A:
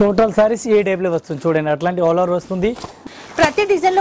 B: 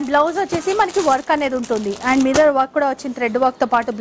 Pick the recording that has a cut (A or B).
A